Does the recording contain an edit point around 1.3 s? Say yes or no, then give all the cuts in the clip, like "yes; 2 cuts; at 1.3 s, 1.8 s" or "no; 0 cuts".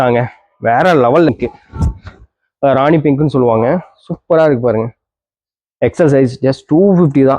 yes; 1 cut; at 1.3 s